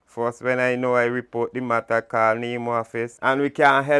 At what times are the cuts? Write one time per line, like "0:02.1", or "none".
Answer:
0:03.0